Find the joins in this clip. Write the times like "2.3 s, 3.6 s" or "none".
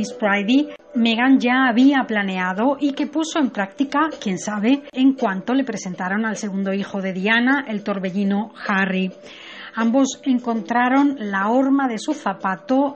10.1 s